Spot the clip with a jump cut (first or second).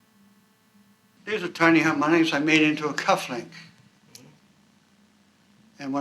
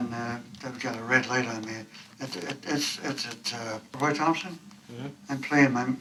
first